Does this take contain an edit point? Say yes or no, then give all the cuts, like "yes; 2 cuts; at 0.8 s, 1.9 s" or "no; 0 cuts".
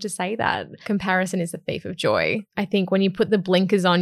yes; 2 cuts; at 0.8 s, 2.5 s